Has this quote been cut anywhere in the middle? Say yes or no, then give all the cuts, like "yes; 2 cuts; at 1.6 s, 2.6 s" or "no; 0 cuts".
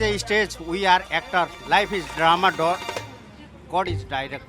no; 0 cuts